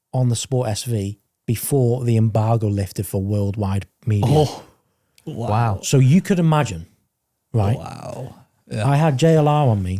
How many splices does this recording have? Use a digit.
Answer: 0